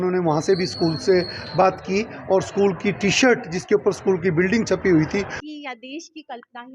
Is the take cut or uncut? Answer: cut